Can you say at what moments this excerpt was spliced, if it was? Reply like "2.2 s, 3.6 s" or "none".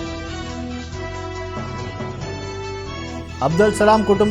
2.8 s